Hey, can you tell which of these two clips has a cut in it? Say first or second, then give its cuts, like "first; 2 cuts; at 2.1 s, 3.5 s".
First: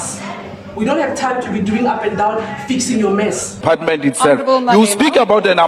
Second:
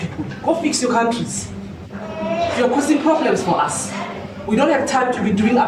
first; 1 cut; at 3.6 s